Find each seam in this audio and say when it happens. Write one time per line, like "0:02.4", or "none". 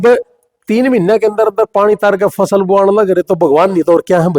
none